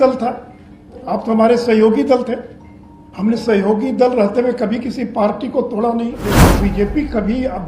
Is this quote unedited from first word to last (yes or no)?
no